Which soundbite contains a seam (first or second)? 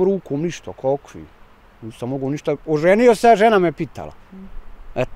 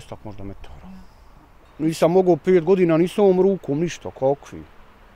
second